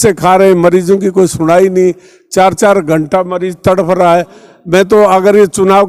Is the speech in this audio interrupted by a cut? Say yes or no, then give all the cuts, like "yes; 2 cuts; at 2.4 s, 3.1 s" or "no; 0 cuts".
no; 0 cuts